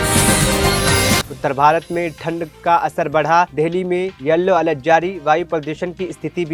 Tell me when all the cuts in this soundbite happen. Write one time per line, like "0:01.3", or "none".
none